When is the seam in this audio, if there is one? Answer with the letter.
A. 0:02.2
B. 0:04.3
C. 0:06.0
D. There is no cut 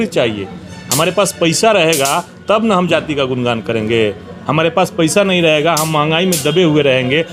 D